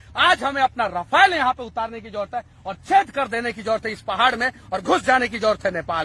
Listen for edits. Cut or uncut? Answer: uncut